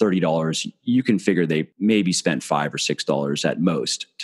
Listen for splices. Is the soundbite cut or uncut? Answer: cut